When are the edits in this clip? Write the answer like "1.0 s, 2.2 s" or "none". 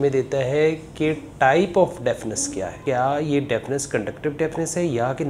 2.8 s